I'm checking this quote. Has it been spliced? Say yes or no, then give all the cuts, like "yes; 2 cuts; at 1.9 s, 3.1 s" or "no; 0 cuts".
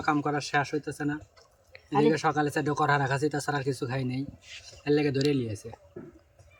no; 0 cuts